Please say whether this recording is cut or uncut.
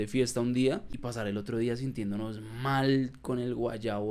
cut